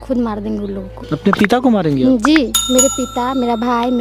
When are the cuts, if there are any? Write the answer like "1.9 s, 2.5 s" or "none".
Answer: 0.9 s